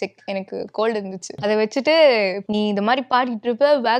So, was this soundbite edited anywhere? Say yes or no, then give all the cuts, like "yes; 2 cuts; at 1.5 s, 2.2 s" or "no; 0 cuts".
yes; 2 cuts; at 1.3 s, 2.4 s